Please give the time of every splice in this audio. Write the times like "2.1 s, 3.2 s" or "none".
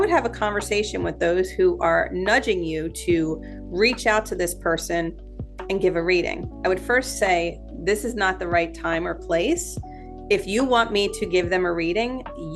none